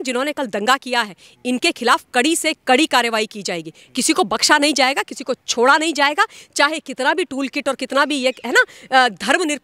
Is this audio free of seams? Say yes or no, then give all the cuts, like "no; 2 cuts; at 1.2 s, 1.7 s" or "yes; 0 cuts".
yes; 0 cuts